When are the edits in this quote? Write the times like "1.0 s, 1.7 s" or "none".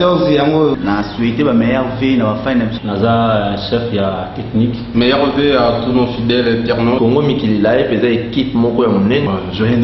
none